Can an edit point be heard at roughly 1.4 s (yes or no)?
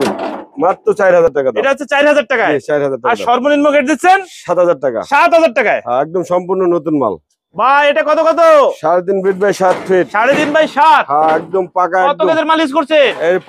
no